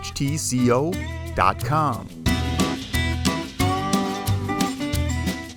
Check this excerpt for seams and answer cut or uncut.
uncut